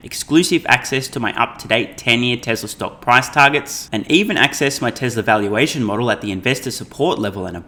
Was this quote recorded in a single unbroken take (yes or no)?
yes